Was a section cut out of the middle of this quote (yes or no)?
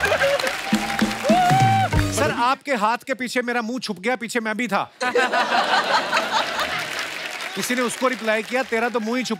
yes